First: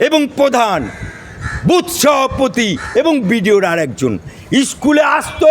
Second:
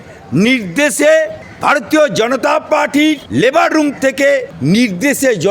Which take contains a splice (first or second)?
second